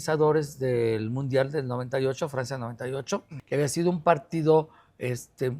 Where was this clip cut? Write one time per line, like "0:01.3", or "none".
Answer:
0:03.3